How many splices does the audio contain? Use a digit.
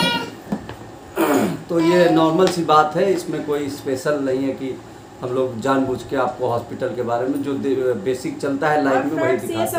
0